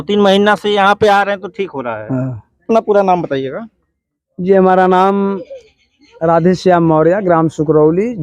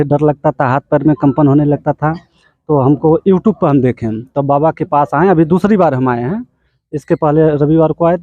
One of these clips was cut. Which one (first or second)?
first